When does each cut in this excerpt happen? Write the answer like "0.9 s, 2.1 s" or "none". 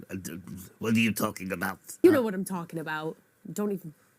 2.0 s